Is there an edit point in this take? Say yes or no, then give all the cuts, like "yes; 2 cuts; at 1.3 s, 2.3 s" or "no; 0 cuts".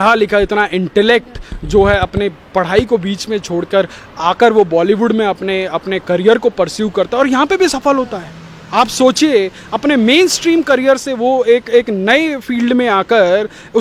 no; 0 cuts